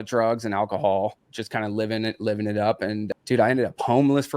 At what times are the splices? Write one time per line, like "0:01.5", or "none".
0:01.3
0:03.1